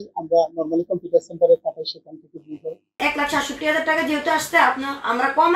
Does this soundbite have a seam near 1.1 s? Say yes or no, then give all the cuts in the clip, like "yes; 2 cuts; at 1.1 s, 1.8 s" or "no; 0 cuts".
no; 1 cut; at 3.0 s